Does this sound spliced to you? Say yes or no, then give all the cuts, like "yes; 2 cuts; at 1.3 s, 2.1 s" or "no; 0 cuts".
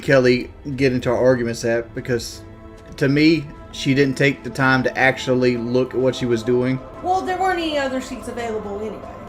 no; 0 cuts